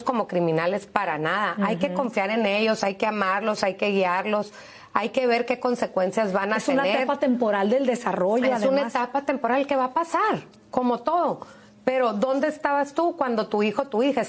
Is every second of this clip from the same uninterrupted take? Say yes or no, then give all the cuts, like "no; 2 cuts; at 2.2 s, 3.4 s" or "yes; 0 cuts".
yes; 0 cuts